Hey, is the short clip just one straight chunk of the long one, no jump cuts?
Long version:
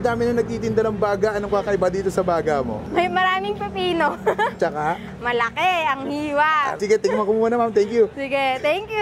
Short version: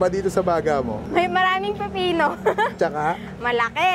yes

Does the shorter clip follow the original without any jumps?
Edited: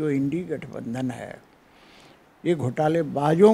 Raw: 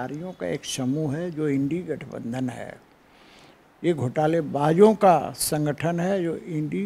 yes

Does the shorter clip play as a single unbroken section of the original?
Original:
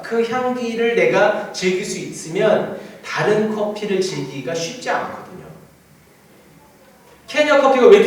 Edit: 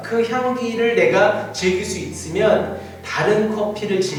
yes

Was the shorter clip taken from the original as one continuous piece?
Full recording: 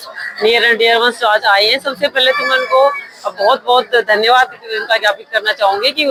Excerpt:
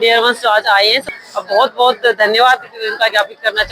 no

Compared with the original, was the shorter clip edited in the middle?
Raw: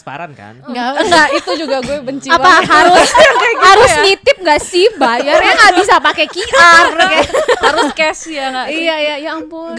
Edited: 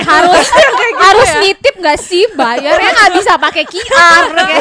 no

